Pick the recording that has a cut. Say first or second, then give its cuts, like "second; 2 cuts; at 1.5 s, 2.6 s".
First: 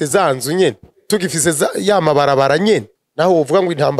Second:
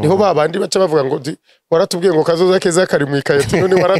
first; 2 cuts; at 0.9 s, 3.0 s